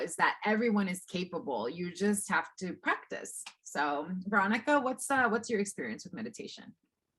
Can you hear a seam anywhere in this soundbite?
no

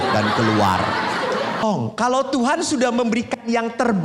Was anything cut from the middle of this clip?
yes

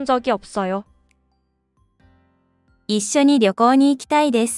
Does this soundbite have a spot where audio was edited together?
no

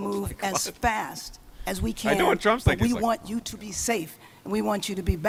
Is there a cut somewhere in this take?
no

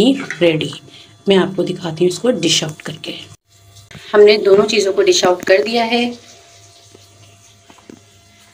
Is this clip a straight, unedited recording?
no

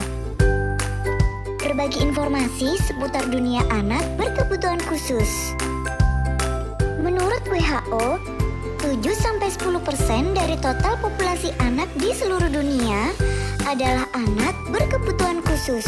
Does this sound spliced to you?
no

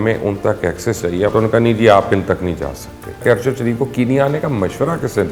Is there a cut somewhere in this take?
yes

